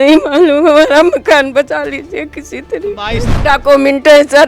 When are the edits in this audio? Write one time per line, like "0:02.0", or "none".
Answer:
0:03.2